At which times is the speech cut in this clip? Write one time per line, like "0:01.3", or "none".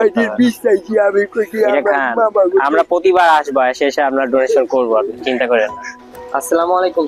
0:05.8